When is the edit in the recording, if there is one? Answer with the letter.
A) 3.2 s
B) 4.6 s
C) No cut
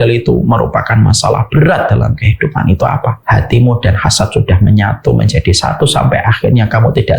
A